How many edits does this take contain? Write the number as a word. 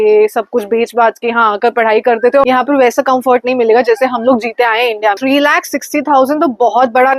two